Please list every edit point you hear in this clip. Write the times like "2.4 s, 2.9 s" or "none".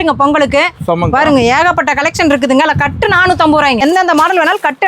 3.8 s